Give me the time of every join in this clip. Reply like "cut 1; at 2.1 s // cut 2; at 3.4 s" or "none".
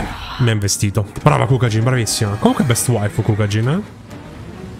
cut 1; at 1.1 s